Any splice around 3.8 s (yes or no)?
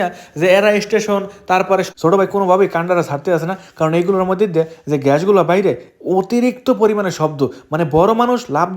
no